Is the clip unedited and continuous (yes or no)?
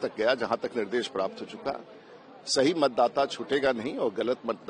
yes